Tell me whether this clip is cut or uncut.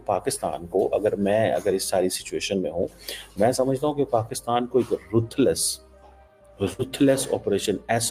uncut